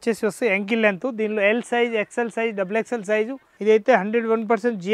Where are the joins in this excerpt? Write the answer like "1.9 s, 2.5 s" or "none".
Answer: 3.4 s